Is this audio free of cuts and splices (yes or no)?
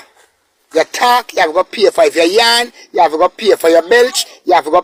yes